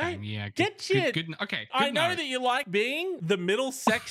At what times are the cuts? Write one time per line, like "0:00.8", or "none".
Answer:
0:01.7
0:02.9